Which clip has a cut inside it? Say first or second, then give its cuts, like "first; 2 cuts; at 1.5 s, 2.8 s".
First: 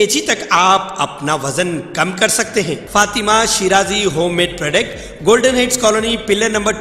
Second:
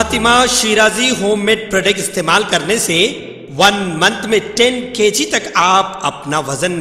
first; 1 cut; at 2.8 s